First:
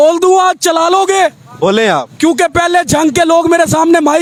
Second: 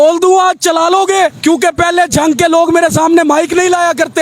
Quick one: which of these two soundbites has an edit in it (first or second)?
second